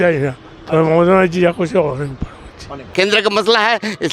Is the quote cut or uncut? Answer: cut